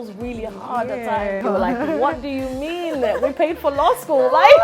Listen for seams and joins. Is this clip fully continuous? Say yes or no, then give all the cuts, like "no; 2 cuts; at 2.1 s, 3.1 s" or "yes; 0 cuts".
no; 1 cut; at 1.4 s